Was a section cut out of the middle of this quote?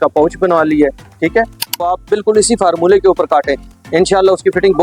yes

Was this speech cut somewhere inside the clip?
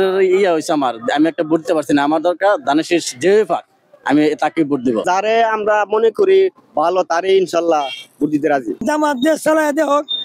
yes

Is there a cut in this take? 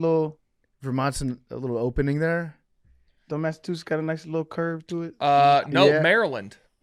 no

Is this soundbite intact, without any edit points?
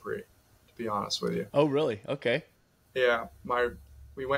yes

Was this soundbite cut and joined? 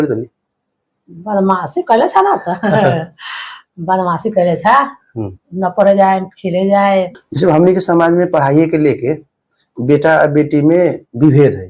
yes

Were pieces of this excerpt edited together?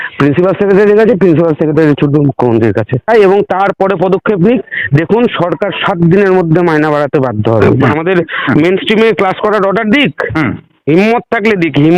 yes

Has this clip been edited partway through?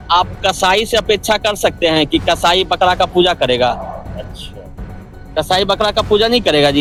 no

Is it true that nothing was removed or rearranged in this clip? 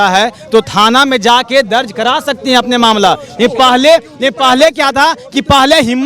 yes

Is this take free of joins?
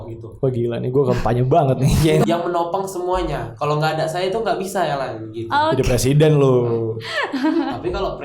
no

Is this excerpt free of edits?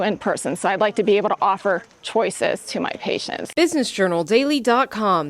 no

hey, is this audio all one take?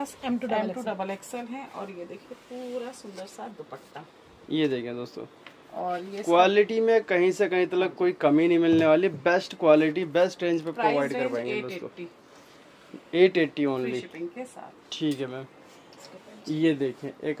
yes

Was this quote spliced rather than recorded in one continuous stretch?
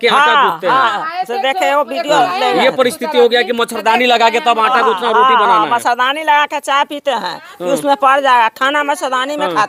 no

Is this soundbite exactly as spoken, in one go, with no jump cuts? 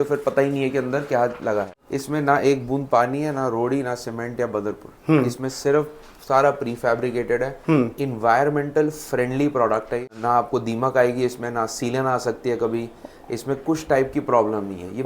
no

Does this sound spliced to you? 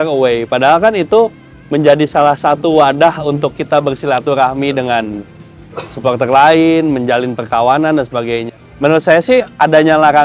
yes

